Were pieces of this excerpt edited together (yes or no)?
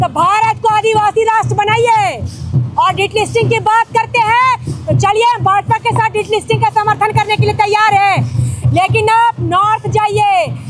no